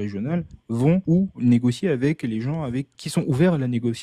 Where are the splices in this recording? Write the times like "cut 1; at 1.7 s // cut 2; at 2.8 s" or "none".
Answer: cut 1; at 1.0 s // cut 2; at 3.0 s